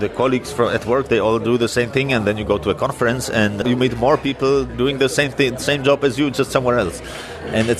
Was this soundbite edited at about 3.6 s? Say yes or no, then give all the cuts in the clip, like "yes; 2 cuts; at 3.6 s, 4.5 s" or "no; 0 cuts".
yes; 1 cut; at 3.6 s